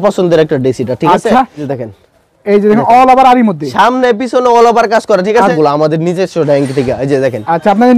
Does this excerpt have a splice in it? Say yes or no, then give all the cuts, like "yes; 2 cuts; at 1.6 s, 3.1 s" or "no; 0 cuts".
yes; 2 cuts; at 1.6 s, 5.5 s